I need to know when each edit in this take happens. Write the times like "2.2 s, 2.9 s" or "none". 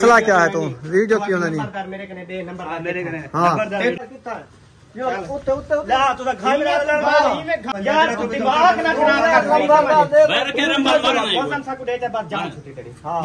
4.0 s, 7.7 s